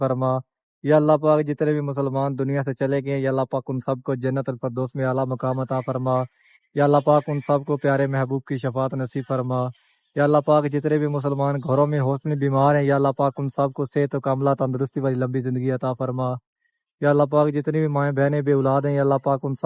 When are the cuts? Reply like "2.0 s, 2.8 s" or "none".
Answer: none